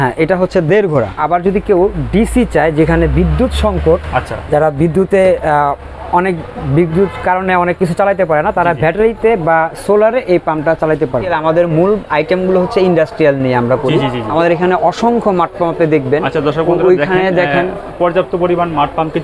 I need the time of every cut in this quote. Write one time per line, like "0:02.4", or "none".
0:01.2
0:11.3
0:14.3